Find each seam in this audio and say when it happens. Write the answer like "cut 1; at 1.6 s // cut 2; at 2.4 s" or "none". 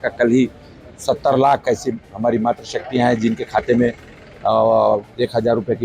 none

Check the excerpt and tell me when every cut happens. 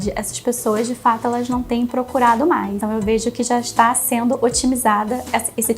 cut 1; at 2.8 s

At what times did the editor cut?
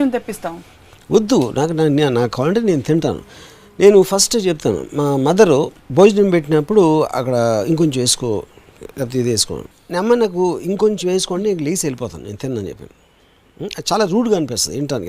none

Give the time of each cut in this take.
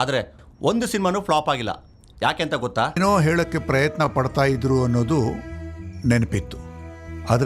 cut 1; at 3.0 s

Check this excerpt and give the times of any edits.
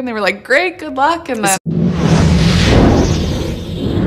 none

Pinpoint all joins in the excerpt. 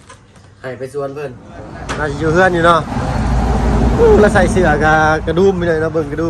cut 1; at 1.8 s

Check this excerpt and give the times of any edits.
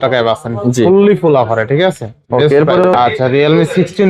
cut 1; at 2.9 s

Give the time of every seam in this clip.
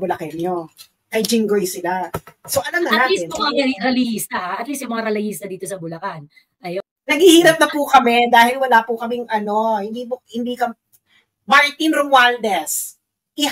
cut 1; at 6.9 s

